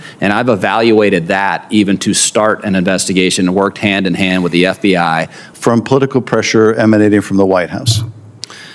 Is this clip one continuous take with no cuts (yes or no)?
no